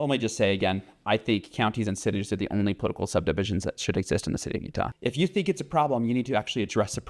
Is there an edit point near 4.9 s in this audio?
yes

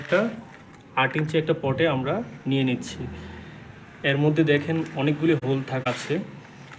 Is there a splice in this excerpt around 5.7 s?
yes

